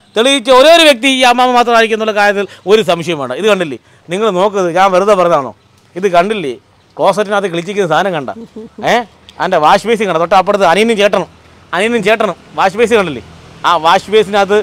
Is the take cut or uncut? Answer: uncut